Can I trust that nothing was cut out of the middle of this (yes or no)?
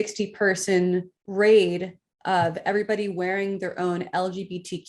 no